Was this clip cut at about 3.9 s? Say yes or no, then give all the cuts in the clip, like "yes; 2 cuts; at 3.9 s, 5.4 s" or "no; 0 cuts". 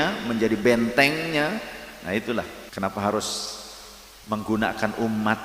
no; 1 cut; at 2.6 s